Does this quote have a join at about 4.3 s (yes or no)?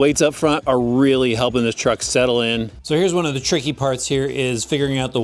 no